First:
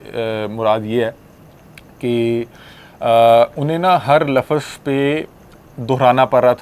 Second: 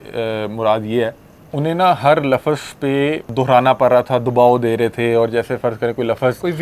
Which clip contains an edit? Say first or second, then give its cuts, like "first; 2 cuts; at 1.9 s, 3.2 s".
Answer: second; 2 cuts; at 1.5 s, 3.2 s